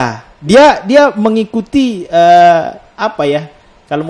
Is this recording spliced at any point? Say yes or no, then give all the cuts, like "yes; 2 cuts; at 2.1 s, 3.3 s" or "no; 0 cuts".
no; 0 cuts